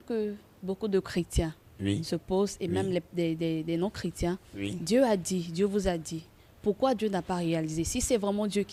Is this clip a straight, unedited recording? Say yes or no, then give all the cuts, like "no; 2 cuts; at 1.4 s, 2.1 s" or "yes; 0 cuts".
yes; 0 cuts